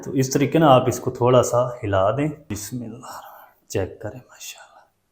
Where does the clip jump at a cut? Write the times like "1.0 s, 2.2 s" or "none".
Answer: 2.4 s